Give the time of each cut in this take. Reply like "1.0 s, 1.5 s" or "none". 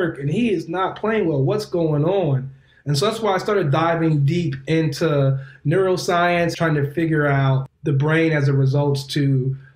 6.5 s, 7.6 s

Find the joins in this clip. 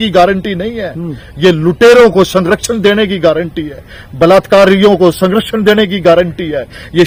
none

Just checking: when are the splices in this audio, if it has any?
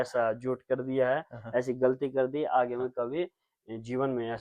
none

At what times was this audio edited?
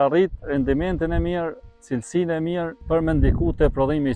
2.8 s

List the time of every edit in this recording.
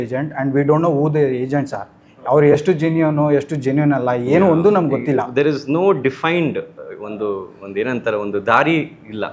none

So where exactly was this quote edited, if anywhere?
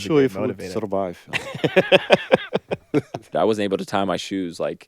3.3 s

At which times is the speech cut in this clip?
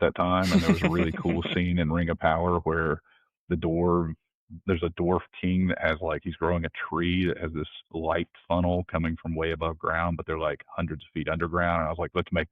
none

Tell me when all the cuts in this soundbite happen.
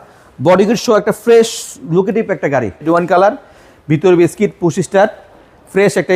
2.9 s

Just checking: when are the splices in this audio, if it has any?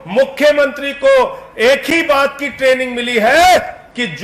none

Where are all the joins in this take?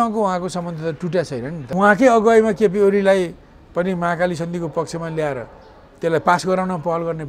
1.6 s

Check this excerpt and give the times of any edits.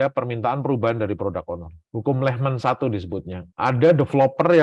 none

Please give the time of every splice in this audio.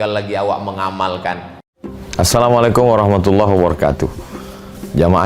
1.6 s

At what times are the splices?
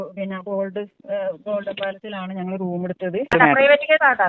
3.3 s

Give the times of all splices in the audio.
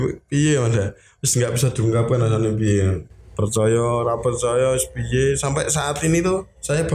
3.2 s

